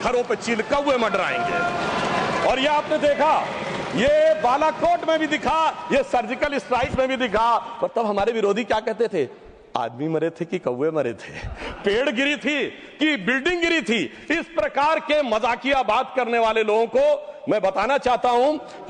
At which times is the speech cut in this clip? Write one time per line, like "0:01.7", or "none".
none